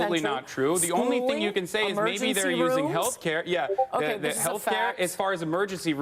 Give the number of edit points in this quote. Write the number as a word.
one